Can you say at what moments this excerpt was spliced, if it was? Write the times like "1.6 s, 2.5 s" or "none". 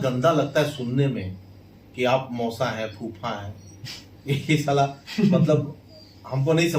none